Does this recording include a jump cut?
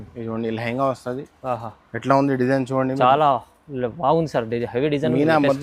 no; 0 cuts

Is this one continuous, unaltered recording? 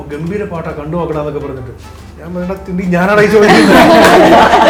yes; 0 cuts

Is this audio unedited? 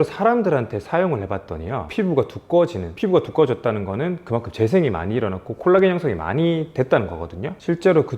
yes; 0 cuts

